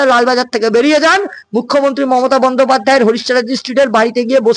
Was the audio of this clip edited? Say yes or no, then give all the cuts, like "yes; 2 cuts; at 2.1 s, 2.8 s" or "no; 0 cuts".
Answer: no; 0 cuts